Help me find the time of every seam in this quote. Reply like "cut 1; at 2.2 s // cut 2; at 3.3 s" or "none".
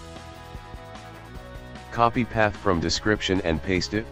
none

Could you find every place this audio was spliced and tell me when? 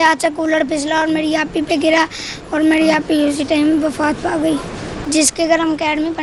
cut 1; at 5.0 s

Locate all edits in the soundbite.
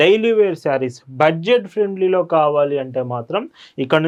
none

